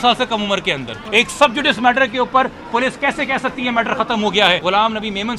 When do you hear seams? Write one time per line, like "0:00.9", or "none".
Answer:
0:00.9
0:04.6